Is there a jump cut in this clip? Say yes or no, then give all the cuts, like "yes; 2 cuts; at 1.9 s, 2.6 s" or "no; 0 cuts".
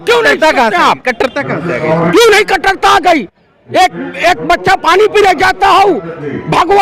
no; 0 cuts